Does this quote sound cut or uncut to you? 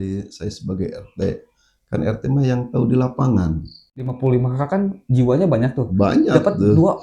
cut